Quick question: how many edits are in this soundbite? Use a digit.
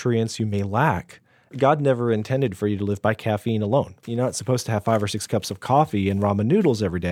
2